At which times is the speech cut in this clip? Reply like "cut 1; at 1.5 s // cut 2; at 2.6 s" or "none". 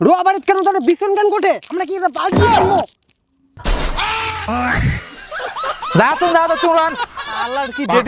none